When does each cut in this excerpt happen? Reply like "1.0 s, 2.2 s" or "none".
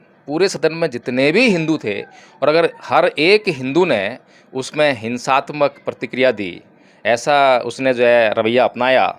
none